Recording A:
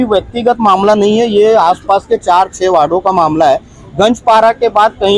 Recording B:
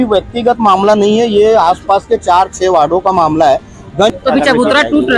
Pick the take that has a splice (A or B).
B